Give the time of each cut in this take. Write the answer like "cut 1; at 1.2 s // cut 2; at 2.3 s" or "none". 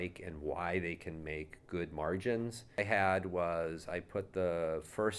cut 1; at 2.8 s